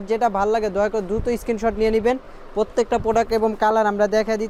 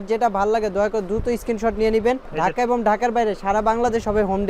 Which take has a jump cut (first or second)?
second